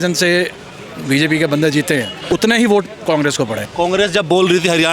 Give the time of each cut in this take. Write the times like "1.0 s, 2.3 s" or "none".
2.1 s, 3.6 s